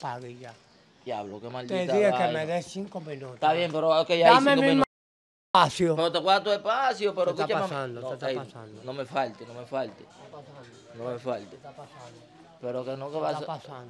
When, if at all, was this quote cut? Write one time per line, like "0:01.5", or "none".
none